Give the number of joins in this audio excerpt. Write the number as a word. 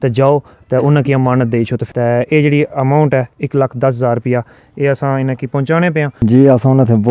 two